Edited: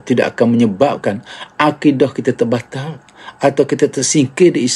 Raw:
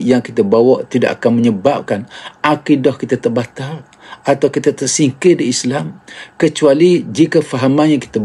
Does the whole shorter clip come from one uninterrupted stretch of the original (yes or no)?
yes